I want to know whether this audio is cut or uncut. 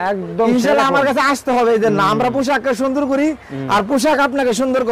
uncut